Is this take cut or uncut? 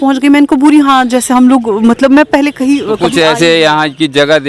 cut